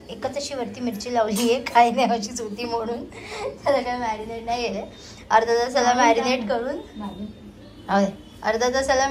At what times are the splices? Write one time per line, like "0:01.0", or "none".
none

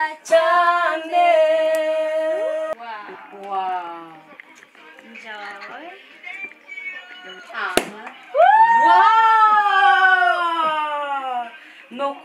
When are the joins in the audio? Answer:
0:02.7

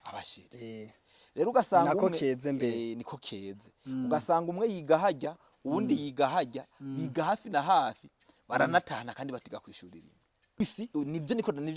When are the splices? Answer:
0:10.6

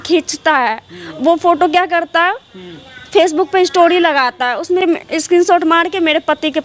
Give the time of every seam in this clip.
0:04.8

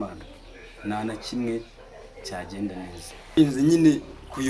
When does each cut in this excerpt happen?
0:03.4

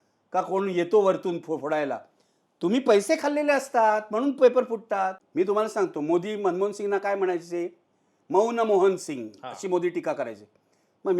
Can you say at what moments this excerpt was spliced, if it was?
0:05.2

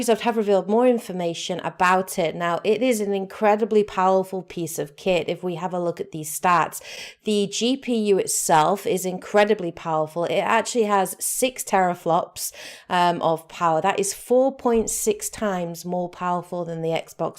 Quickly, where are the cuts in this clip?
0:09.1

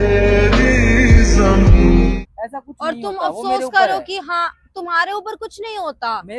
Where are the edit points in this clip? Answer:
0:02.2

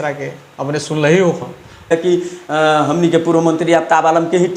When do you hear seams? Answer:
0:01.9

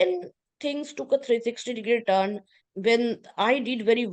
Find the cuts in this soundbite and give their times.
none

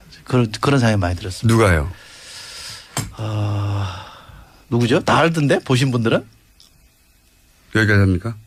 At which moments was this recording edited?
none

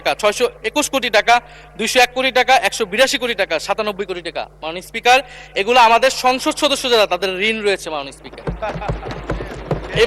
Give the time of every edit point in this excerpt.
none

